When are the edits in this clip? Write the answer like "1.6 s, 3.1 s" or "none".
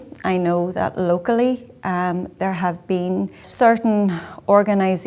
3.5 s